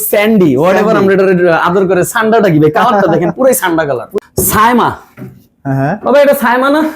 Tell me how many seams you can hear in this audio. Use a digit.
1